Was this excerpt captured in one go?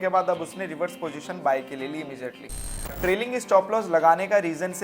no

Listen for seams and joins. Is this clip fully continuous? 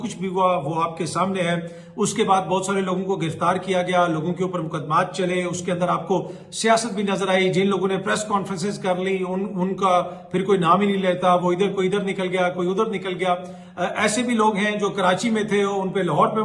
yes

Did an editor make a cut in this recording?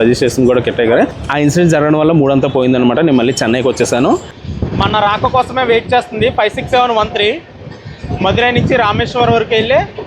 yes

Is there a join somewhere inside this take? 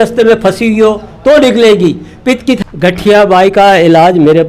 yes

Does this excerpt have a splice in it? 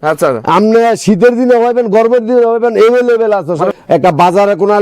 yes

